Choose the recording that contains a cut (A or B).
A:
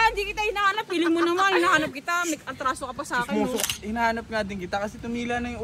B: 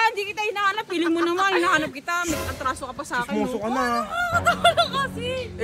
A